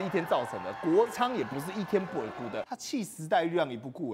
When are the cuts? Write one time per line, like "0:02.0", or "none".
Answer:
0:02.8